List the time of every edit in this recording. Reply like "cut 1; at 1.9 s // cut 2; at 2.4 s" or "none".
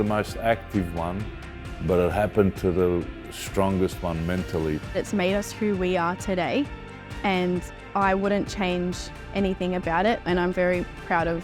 none